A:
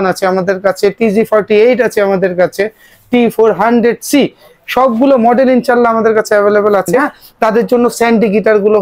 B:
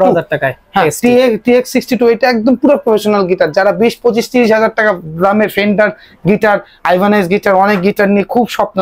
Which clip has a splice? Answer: A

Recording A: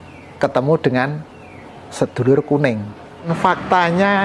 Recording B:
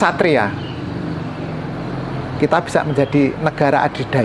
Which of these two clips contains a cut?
A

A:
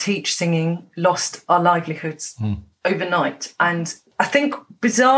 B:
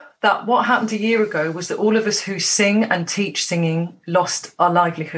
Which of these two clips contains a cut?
A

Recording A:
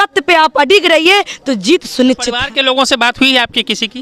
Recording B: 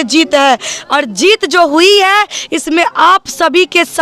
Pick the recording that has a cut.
A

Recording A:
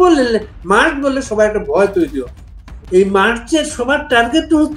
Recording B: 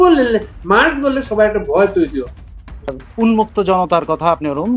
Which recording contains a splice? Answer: B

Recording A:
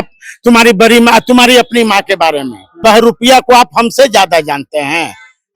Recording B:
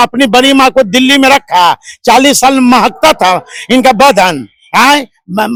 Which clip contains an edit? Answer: A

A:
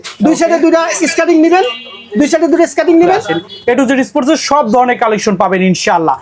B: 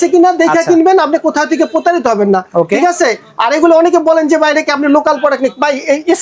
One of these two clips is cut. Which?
A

